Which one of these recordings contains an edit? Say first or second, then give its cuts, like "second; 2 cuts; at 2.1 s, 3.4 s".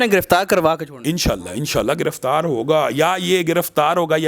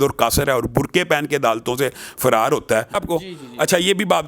second; 1 cut; at 3.0 s